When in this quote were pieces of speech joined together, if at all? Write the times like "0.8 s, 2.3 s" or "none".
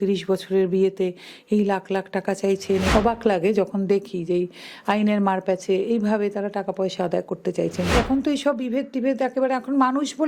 2.9 s, 7.9 s